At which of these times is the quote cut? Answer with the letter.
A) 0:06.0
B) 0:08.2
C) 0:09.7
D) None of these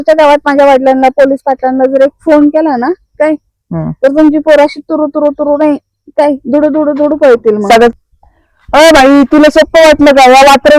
B